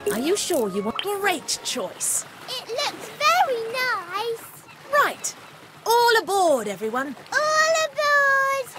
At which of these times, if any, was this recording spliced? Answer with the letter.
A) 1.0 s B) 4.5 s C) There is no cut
A